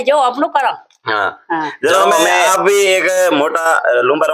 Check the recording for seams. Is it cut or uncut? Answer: cut